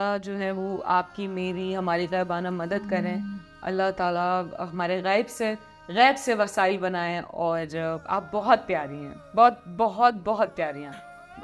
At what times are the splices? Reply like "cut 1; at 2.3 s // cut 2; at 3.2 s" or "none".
none